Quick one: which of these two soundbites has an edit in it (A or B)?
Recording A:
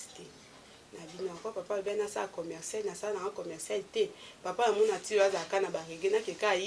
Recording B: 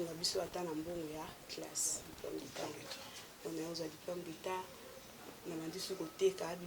B